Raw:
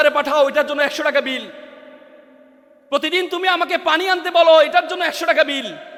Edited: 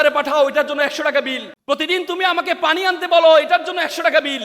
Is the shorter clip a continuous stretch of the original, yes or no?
no